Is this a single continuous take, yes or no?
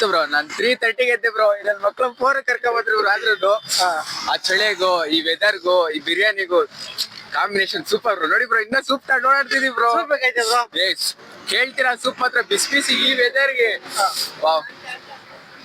yes